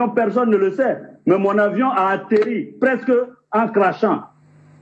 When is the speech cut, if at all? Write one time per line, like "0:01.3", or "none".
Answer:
0:01.1
0:02.5